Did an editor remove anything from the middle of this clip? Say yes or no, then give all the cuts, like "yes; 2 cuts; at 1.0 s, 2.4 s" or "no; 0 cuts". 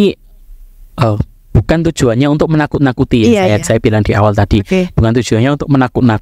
no; 0 cuts